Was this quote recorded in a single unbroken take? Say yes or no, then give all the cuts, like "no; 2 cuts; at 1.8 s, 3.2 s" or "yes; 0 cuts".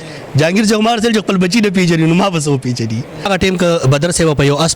no; 1 cut; at 3.3 s